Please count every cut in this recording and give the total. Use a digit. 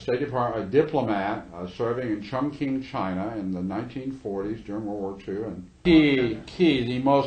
1